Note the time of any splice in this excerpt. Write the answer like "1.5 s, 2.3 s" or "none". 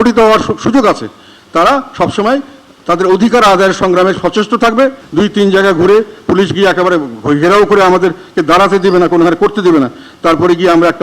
5.0 s